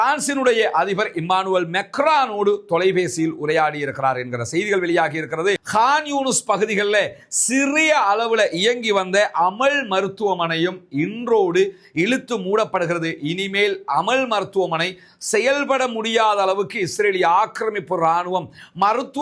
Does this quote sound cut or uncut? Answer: cut